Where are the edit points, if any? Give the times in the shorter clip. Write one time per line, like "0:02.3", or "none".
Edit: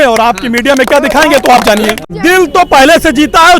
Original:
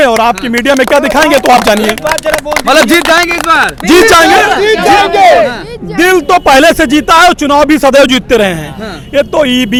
0:02.0